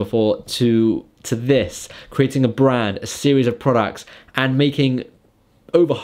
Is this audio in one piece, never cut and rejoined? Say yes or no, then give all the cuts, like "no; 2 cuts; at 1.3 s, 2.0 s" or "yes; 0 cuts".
yes; 0 cuts